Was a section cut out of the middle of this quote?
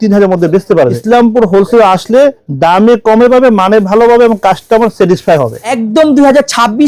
yes; 2 cuts; at 1.0 s, 5.7 s

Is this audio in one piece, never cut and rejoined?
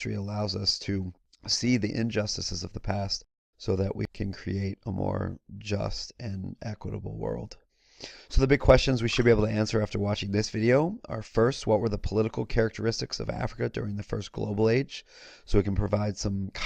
no; 1 cut; at 7.2 s

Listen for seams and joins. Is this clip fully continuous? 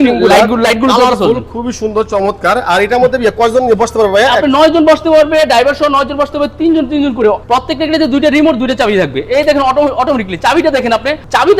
no; 1 cut; at 7.4 s

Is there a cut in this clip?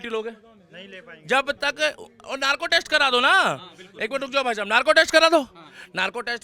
no; 0 cuts

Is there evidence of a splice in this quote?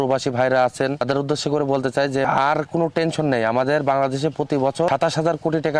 yes; 3 cuts; at 1.0 s, 2.3 s, 4.9 s

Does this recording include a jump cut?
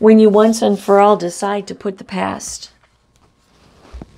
no; 0 cuts

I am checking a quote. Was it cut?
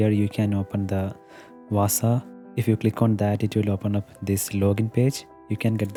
no; 0 cuts

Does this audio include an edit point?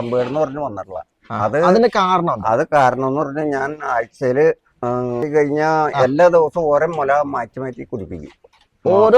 yes; 1 cut; at 5.2 s

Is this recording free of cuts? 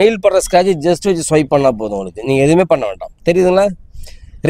yes; 0 cuts

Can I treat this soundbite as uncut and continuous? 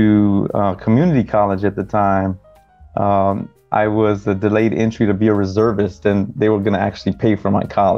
yes; 0 cuts

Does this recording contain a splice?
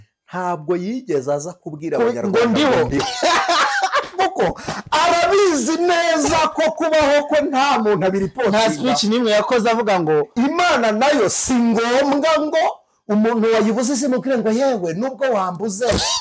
yes; 1 cut; at 10.3 s

